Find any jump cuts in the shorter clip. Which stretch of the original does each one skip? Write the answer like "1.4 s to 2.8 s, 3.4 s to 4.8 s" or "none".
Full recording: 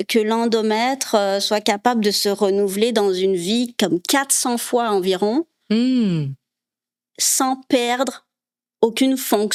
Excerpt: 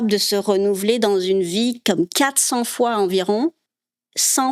5.6 s to 6.6 s